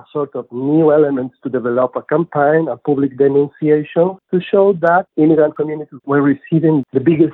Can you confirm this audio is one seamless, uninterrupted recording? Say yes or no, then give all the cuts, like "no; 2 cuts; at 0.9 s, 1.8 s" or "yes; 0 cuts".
yes; 0 cuts